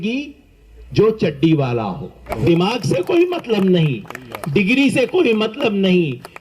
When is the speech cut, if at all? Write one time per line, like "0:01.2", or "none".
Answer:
0:02.3